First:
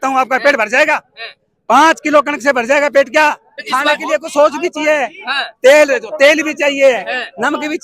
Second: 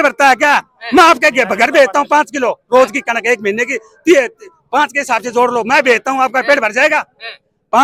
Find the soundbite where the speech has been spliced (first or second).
first